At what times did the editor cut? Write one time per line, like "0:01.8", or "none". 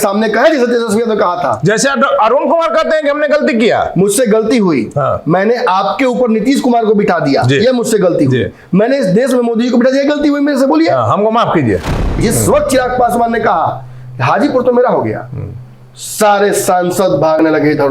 0:12.1